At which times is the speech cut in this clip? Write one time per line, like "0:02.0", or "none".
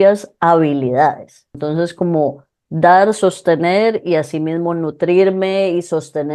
0:01.4